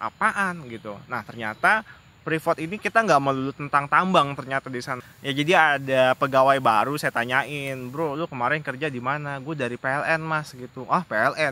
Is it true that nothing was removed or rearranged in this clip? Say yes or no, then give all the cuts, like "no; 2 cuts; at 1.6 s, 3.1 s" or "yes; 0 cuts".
no; 1 cut; at 5.0 s